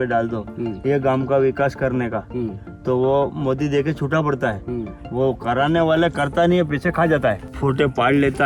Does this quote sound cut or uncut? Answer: cut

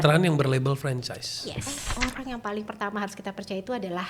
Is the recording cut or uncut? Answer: cut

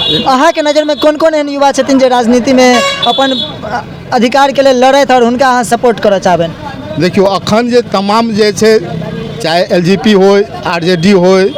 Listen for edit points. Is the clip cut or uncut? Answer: uncut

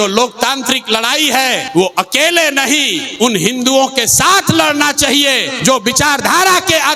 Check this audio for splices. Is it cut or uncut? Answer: cut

